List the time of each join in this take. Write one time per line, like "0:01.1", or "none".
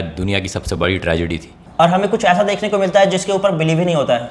0:01.0